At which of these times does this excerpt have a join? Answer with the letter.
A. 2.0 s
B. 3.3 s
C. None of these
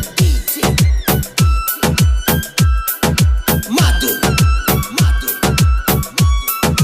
C